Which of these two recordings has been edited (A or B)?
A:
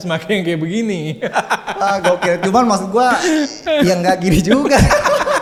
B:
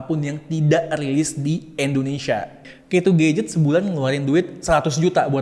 B